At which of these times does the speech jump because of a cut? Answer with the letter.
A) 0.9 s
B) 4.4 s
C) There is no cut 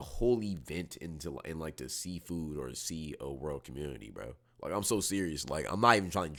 C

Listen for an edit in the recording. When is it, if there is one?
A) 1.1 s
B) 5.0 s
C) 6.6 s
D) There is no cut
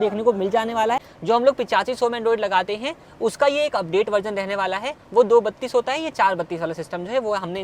A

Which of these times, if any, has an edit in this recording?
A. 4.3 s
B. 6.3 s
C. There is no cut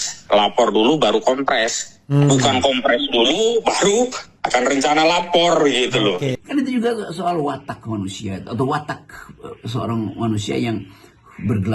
B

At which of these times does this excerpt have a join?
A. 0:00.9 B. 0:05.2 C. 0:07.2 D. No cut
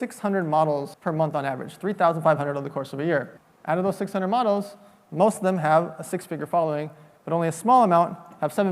A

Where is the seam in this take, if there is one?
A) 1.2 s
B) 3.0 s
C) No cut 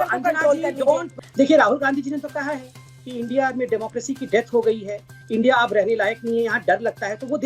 A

